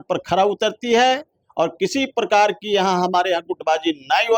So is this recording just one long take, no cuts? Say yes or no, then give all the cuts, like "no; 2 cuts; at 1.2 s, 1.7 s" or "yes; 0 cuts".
yes; 0 cuts